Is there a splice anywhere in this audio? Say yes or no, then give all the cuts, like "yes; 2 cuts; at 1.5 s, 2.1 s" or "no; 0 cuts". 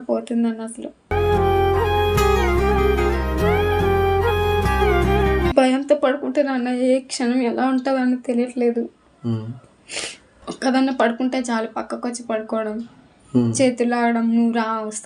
no; 0 cuts